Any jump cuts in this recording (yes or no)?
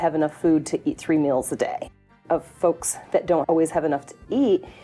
yes